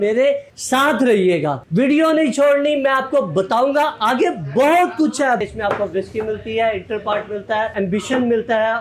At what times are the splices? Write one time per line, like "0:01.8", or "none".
0:05.5
0:07.7